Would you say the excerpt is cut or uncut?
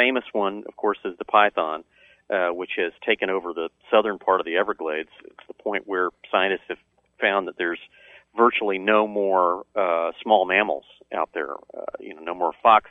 uncut